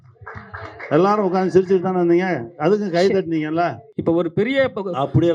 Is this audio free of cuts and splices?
no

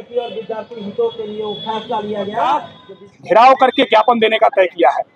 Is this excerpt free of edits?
no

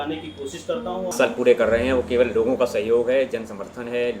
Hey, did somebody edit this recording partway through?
yes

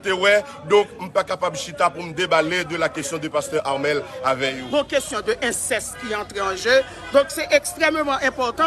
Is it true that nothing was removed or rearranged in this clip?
no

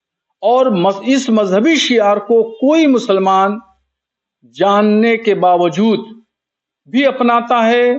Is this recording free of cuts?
yes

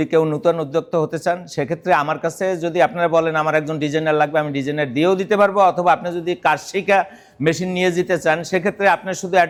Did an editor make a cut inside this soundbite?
no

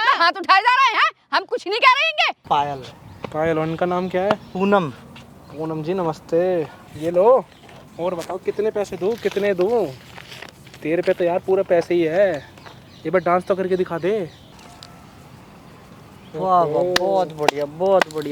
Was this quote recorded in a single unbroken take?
no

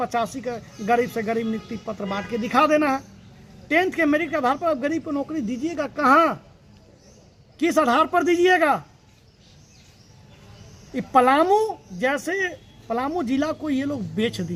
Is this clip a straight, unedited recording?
yes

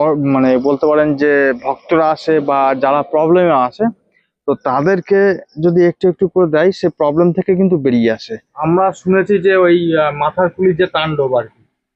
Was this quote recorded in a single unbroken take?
no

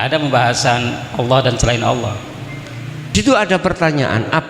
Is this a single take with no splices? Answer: no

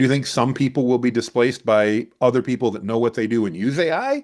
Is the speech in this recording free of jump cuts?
yes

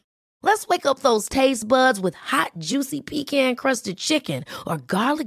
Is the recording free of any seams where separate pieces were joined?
yes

